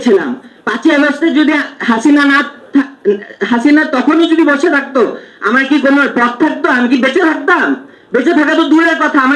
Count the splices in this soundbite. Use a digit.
0